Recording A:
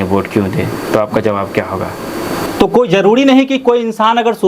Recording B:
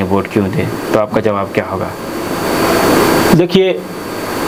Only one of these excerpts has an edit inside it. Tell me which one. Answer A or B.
A